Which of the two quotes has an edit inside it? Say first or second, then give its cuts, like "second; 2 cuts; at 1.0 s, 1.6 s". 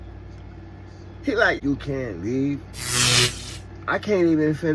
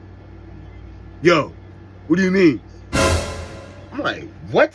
first; 1 cut; at 1.6 s